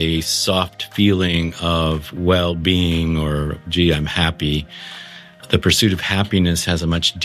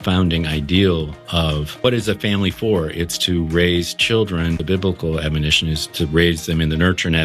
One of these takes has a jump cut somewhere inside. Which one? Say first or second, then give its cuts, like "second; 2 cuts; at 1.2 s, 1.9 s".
second; 2 cuts; at 1.8 s, 4.6 s